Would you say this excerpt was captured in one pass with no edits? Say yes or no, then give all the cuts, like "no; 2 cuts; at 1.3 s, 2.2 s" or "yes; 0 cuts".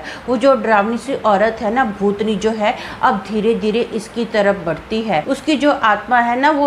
no; 1 cut; at 5.2 s